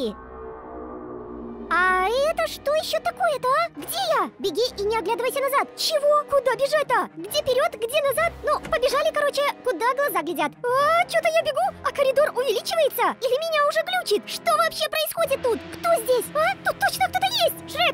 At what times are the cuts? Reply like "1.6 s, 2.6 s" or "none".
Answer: none